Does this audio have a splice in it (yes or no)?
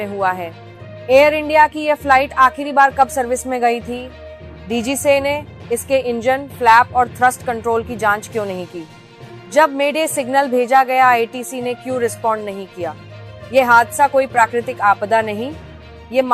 no